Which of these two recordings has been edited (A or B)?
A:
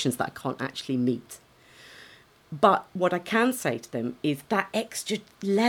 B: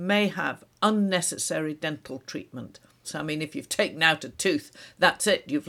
B